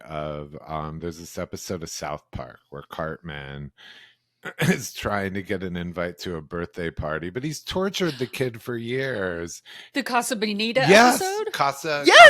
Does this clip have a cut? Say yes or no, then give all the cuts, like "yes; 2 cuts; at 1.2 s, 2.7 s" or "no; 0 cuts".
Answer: no; 0 cuts